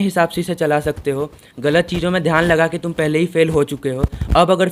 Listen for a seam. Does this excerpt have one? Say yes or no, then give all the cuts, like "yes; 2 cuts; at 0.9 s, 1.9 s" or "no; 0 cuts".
no; 0 cuts